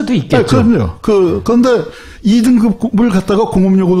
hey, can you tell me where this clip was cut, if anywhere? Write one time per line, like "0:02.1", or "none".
0:03.1